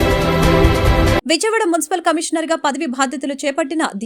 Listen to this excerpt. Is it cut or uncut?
cut